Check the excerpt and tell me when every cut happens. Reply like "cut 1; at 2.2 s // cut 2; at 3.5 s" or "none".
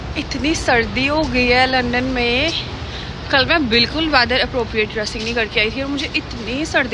none